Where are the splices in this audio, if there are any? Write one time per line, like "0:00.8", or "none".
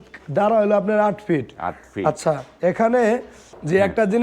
none